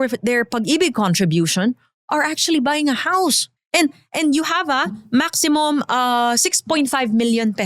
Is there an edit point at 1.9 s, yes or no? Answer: no